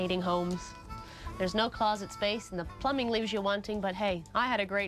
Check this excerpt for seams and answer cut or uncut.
cut